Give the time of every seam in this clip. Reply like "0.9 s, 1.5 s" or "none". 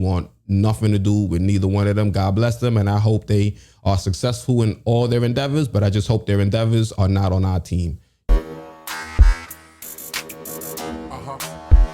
8.1 s